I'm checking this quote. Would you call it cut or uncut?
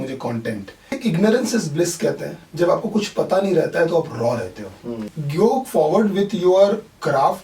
cut